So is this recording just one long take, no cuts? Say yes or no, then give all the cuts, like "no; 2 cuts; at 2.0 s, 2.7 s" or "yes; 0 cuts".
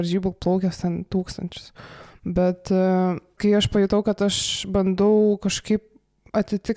no; 1 cut; at 3.3 s